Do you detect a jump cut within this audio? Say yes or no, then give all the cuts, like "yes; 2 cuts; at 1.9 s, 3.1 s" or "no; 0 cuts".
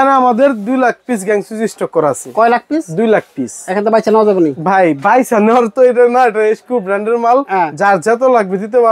no; 0 cuts